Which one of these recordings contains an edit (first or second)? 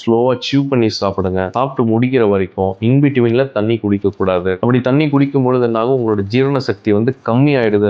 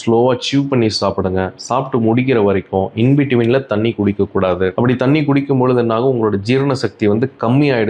first